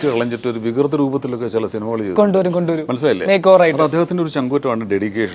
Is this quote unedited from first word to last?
yes; 0 cuts

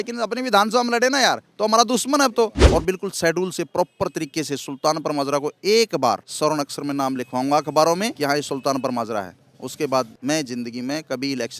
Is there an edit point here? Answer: yes; 4 cuts; at 2.6 s, 6.3 s, 8.1 s, 10.1 s

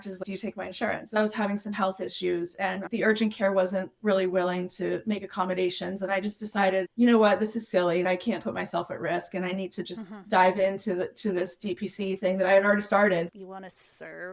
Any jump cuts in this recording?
yes; 2 cuts; at 1.2 s, 13.3 s

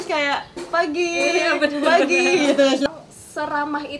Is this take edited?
yes; 1 cut; at 2.9 s

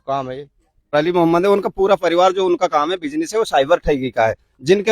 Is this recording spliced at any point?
yes; 1 cut; at 0.9 s

